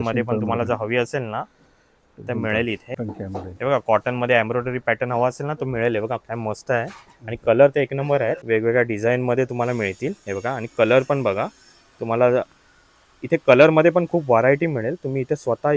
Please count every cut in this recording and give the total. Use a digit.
2